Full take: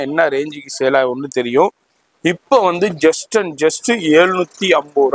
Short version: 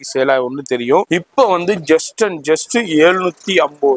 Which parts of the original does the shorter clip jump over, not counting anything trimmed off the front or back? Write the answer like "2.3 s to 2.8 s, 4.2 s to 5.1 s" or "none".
1.7 s to 2.2 s

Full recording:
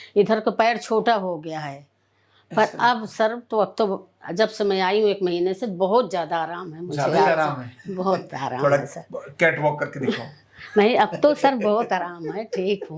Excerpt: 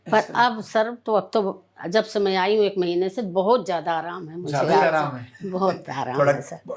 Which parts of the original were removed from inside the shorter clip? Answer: none

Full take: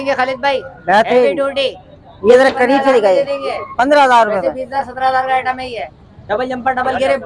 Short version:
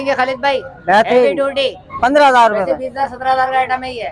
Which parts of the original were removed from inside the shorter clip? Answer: 1.8 s to 3.6 s

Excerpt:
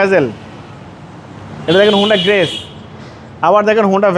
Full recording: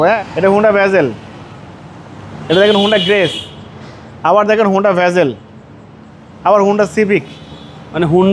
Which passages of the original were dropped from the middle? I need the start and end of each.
none

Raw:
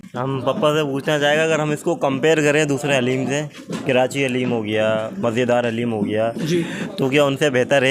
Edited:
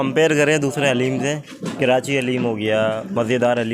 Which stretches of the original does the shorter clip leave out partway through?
none

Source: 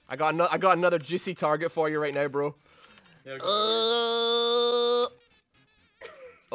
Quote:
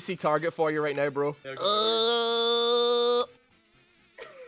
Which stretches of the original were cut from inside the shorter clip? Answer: 2.6 s to 3.3 s

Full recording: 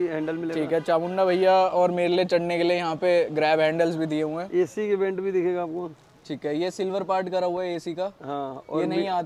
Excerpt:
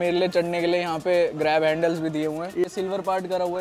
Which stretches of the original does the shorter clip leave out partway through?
4.6 s to 6.7 s

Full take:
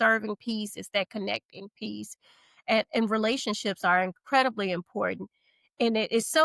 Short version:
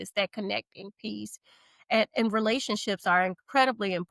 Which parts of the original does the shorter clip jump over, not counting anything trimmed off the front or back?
none

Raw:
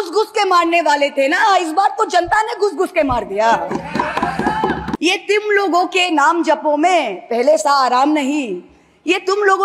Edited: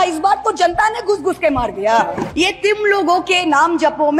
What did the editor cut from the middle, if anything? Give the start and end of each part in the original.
3.8 s to 5.0 s

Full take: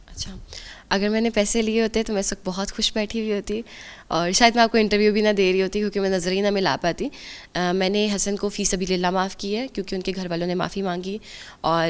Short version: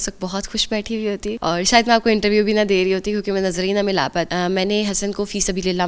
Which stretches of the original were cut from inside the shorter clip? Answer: 3.6 s to 4.1 s, 7.0 s to 7.5 s

